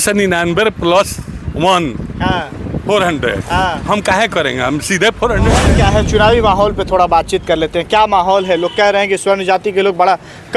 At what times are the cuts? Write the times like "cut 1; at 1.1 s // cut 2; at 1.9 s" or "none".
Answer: cut 1; at 5.6 s